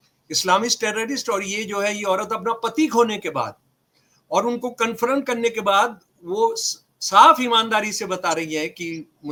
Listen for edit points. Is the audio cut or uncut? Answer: uncut